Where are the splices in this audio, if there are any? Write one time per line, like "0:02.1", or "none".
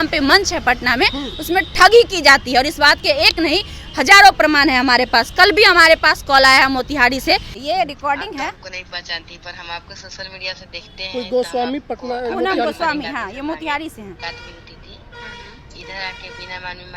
0:07.5